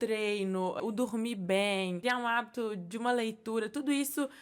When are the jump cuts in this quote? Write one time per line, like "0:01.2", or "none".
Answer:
0:00.8
0:02.0